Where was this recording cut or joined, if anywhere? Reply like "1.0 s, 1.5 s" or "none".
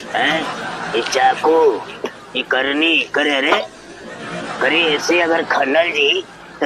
3.6 s